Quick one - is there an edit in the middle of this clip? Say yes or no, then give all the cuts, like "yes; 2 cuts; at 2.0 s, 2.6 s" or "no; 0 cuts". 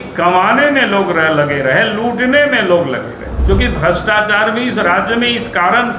yes; 1 cut; at 3.3 s